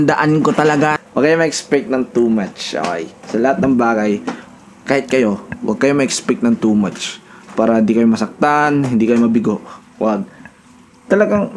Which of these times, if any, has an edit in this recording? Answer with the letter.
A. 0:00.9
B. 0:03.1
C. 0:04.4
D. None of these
A